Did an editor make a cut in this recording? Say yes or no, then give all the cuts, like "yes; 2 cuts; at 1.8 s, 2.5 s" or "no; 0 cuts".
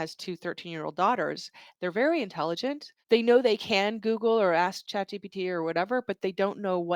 yes; 2 cuts; at 2.9 s, 4.8 s